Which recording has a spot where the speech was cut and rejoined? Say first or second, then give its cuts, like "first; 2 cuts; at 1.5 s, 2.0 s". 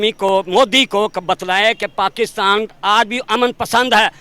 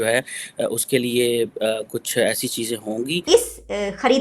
second; 1 cut; at 3.2 s